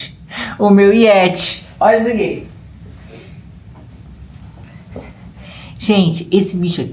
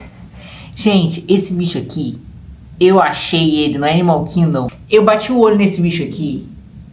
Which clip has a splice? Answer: second; 1 cut; at 4.7 s

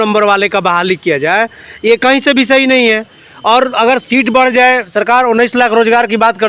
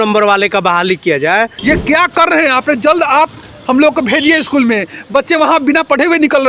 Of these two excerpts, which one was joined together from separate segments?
second; 1 cut; at 1.5 s

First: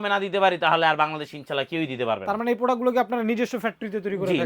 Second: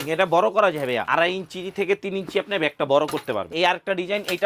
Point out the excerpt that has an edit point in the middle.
second; 2 cuts; at 1.1 s, 3.5 s

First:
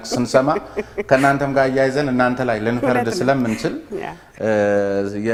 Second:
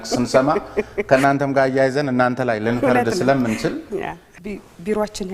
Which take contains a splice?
second; 1 cut; at 4.2 s

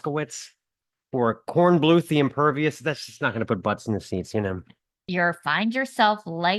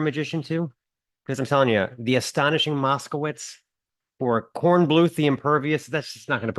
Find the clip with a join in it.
first; 1 cut; at 5.0 s

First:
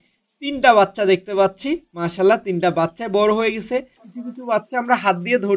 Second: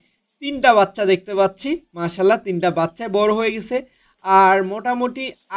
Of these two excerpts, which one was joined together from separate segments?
first; 1 cut; at 4.1 s

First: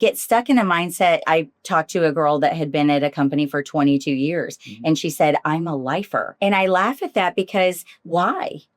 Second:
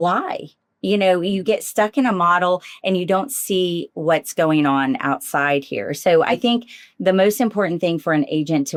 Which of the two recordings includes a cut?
first; 1 cut; at 6.3 s

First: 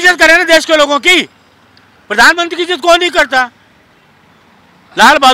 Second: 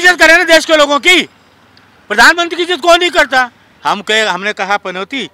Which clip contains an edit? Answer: second; 1 cut; at 3.6 s

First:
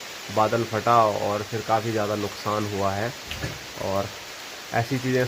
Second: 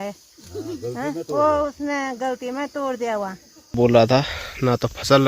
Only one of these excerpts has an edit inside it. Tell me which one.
second; 1 cut; at 3.8 s

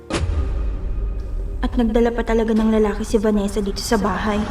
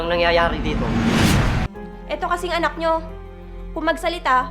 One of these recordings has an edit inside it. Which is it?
second; 1 cut; at 1.6 s

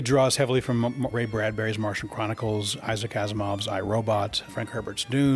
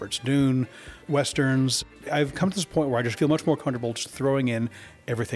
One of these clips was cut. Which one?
second; 2 cuts; at 1.8 s, 3.1 s

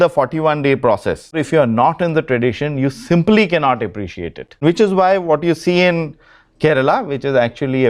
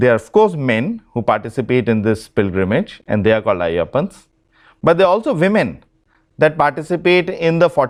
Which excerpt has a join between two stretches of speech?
first; 2 cuts; at 1.4 s, 4.5 s

